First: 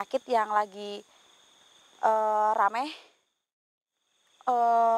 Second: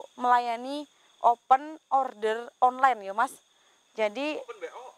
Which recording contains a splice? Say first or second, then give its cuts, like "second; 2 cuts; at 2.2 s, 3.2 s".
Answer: first; 1 cut; at 3.9 s